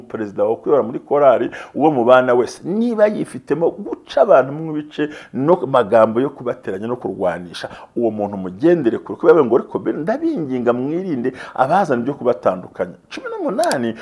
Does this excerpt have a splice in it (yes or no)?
no